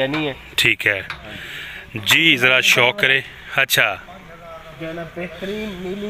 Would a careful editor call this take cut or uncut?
uncut